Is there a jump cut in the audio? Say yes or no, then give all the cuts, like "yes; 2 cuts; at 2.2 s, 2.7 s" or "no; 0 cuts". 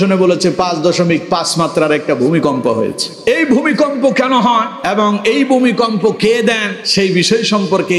yes; 3 cuts; at 3.1 s, 4.8 s, 6.8 s